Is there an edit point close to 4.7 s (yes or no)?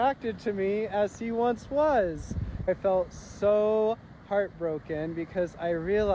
no